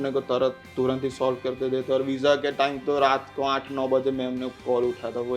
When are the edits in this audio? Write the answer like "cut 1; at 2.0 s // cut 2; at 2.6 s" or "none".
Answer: none